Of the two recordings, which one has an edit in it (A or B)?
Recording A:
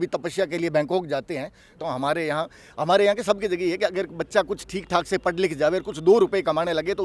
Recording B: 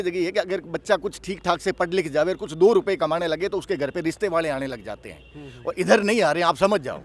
A